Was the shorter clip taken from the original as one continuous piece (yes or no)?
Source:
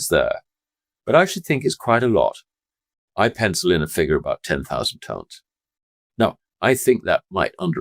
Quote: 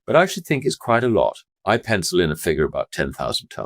no